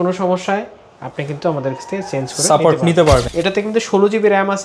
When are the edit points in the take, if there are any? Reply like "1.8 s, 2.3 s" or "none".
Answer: 3.3 s